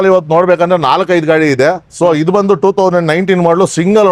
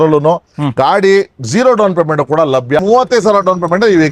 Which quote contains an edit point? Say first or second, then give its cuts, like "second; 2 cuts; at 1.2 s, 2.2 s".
second; 1 cut; at 2.8 s